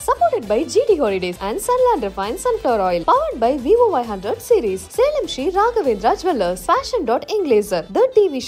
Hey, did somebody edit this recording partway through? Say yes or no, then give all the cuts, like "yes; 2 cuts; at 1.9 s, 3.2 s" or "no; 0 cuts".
no; 0 cuts